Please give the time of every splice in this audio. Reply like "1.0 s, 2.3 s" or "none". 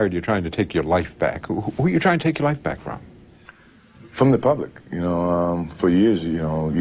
1.6 s